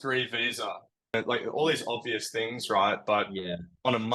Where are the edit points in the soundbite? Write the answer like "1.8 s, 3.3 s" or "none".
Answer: 1.1 s